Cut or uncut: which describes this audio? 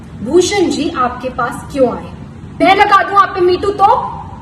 cut